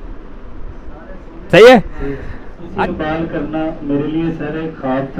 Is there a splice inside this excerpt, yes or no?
yes